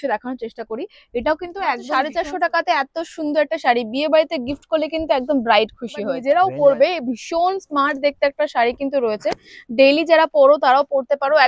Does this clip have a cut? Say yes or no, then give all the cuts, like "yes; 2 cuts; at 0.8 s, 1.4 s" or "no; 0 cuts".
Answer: yes; 2 cuts; at 1.8 s, 6.2 s